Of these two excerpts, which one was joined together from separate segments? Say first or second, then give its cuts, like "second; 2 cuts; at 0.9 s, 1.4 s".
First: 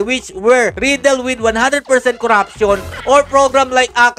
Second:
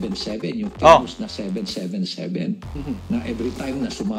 second; 1 cut; at 2.6 s